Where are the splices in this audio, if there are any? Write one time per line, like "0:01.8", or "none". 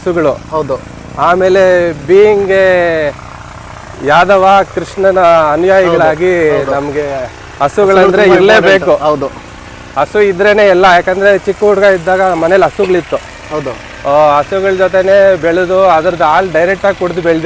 none